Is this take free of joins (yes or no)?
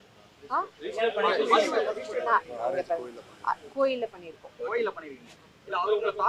yes